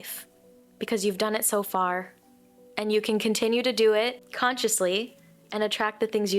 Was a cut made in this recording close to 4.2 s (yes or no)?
yes